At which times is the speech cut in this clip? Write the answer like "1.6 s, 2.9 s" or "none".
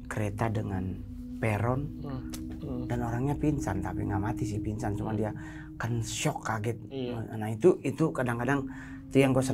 none